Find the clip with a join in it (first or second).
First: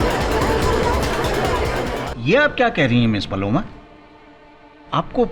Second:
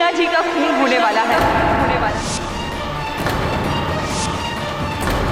first